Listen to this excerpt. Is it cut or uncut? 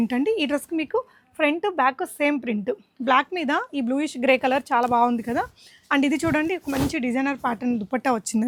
uncut